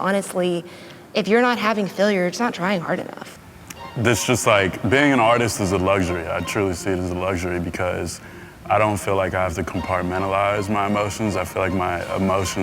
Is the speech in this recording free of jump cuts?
no; 1 cut; at 3.2 s

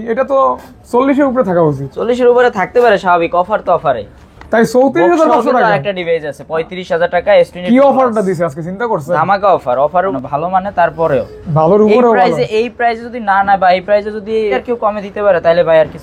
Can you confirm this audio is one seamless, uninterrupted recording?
no; 2 cuts; at 10.1 s, 14.6 s

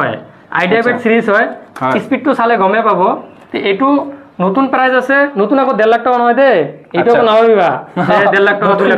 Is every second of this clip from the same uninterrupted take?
yes; 0 cuts

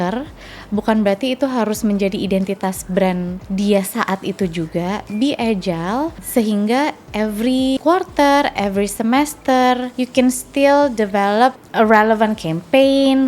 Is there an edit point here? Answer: yes; 5 cuts; at 3.4 s, 6.2 s, 7.8 s, 9.9 s, 11.6 s

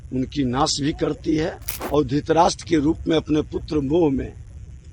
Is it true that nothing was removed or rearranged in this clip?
no; 1 cut; at 1.7 s

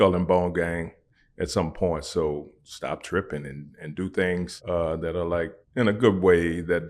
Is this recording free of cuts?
no; 3 cuts; at 2.6 s, 4.5 s, 5.6 s

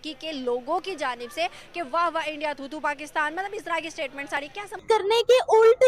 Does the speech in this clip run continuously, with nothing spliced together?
no; 1 cut; at 4.8 s

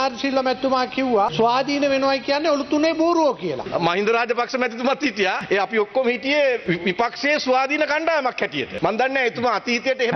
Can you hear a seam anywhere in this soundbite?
yes; 5 cuts; at 1.3 s, 3.6 s, 5.4 s, 6.6 s, 8.7 s

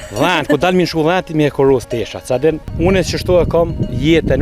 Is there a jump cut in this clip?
yes; 1 cut; at 2.7 s

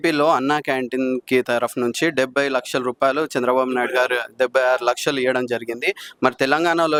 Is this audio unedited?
yes; 0 cuts

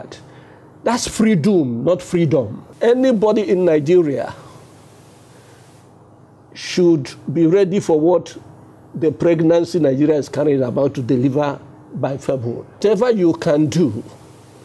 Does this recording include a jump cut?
yes; 2 cuts; at 2.6 s, 12.8 s

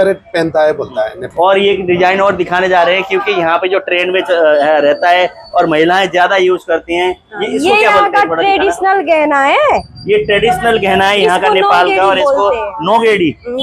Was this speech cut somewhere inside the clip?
yes; 1 cut; at 1.2 s

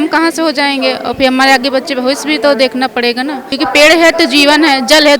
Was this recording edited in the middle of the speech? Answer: yes; 1 cut; at 3.4 s

